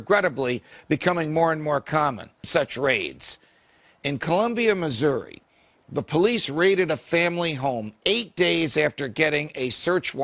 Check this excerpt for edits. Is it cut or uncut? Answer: uncut